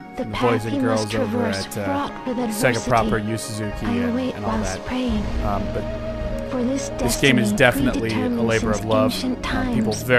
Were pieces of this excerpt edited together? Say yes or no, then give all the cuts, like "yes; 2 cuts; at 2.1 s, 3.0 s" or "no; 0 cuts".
no; 0 cuts